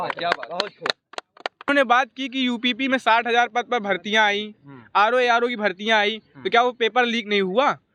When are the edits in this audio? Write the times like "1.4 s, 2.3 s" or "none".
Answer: 1.7 s